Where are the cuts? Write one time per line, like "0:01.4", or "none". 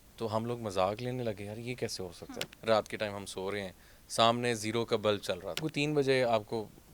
0:02.5
0:05.7

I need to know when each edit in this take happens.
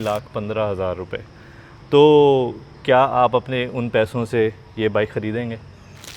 none

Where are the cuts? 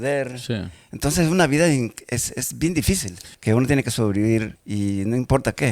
0:03.2

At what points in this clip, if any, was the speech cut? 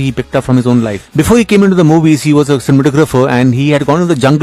0:01.0

